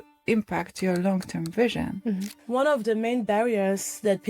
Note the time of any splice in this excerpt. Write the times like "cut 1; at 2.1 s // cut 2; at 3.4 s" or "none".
cut 1; at 2.3 s